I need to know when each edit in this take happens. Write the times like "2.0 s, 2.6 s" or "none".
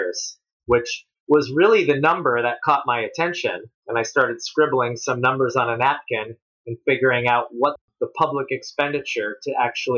3.7 s, 7.8 s